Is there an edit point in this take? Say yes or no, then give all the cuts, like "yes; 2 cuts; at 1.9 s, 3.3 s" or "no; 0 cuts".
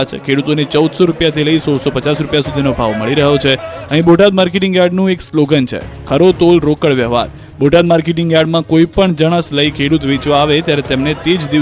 no; 0 cuts